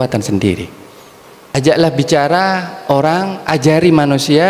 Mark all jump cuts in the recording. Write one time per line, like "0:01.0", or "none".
0:01.6